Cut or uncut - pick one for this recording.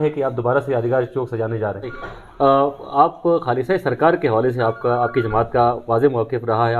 cut